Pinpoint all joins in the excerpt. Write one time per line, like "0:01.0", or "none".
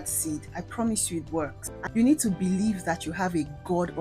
0:01.7